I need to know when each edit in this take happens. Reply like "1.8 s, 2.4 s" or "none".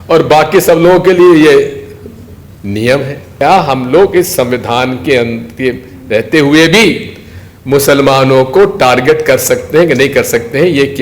3.4 s